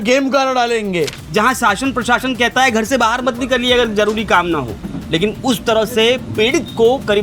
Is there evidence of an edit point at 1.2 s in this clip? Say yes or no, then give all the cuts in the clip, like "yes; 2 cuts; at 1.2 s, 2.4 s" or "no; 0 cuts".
yes; 1 cut; at 1.2 s